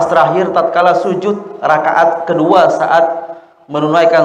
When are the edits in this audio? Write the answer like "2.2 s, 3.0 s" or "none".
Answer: none